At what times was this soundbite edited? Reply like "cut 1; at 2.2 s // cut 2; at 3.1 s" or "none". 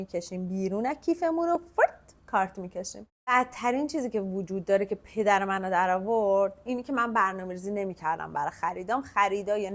cut 1; at 3.3 s